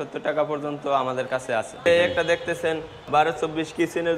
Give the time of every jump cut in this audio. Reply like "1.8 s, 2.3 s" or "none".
1.9 s, 3.1 s